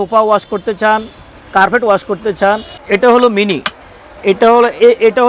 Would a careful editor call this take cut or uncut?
cut